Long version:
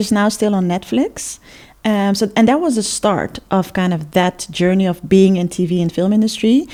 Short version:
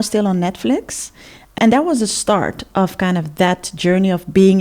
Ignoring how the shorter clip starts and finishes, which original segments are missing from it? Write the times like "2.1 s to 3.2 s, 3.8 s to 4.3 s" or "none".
1.8 s to 2.3 s